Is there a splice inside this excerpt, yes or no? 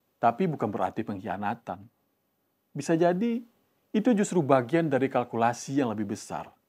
no